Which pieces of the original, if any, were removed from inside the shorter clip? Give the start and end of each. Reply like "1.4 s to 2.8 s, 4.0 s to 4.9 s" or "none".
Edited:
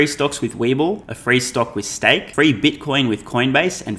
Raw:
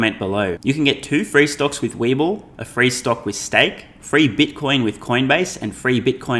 2.5 s to 2.6 s, 3.8 s to 4.0 s